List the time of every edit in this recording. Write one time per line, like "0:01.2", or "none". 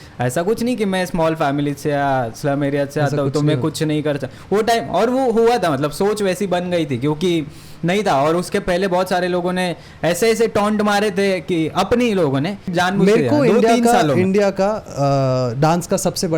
0:12.7